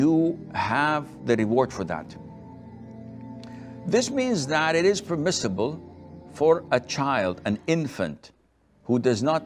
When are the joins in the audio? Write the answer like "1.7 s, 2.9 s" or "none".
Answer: 2.4 s, 3.8 s